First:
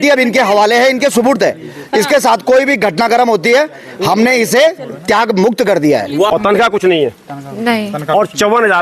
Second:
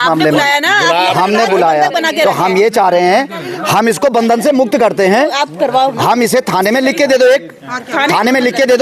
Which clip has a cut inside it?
first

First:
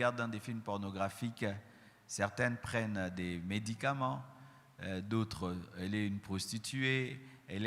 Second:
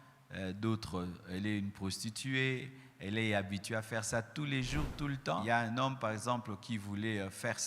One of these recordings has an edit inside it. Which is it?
second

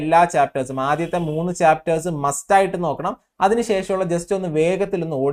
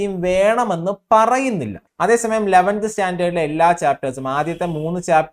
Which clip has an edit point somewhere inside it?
second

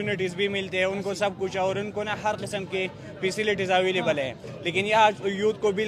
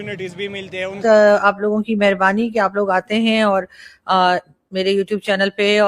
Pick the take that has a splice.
second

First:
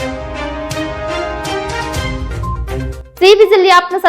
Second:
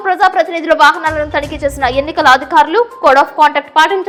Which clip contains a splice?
first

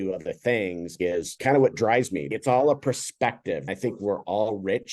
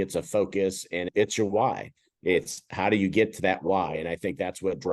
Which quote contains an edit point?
first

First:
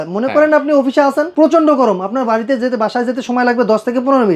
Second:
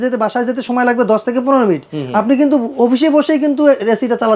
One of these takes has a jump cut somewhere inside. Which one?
first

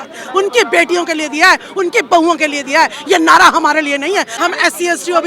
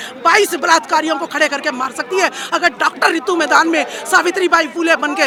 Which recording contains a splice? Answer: first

